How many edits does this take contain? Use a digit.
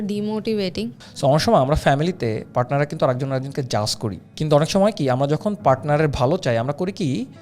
2